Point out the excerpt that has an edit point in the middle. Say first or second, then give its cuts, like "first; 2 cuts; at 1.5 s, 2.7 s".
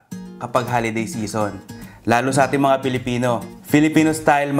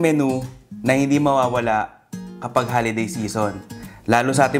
first; 1 cut; at 3.5 s